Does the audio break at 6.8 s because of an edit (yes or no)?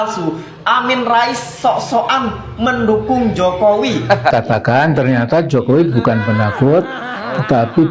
no